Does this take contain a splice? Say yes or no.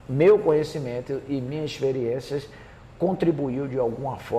no